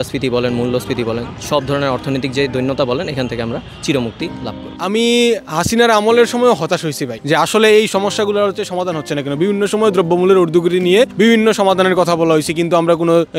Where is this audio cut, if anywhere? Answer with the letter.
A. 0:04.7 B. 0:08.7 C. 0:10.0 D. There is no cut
A